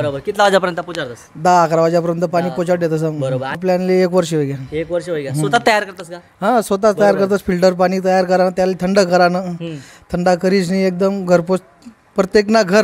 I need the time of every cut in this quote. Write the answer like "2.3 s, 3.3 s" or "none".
3.6 s